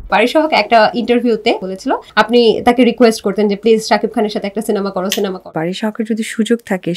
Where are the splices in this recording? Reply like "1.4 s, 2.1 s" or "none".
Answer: 1.6 s, 5.5 s